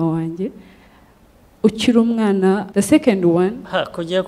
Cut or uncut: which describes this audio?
cut